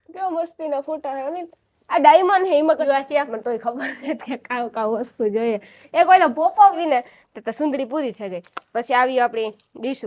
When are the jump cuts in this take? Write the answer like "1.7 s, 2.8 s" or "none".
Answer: 2.8 s, 6.8 s

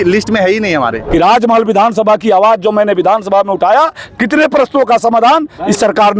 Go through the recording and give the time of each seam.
1.0 s

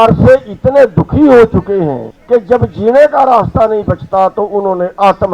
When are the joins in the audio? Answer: 2.1 s

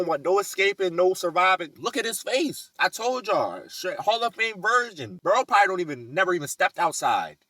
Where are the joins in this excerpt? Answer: 1.7 s, 2.6 s

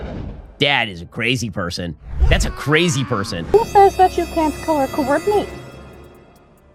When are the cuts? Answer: none

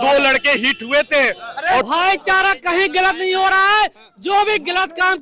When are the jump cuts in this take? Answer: 1.9 s

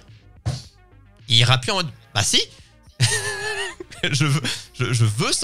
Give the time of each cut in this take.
none

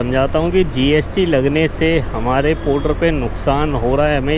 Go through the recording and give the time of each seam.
none

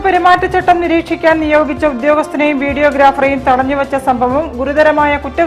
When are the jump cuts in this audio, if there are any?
none

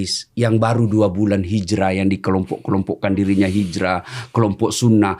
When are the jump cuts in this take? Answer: none

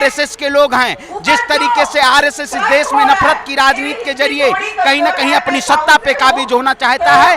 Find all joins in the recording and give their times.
none

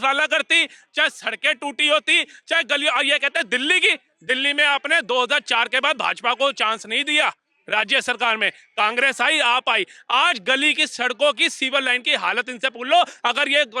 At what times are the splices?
none

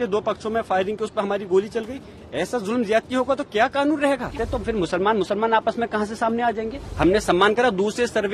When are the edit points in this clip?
4.4 s, 6.8 s

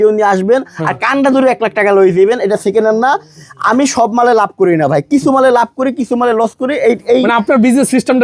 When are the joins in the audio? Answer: none

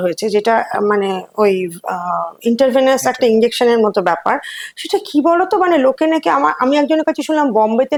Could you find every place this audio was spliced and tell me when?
none

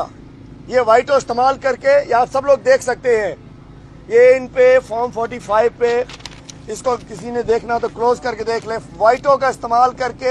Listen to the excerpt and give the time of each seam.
none

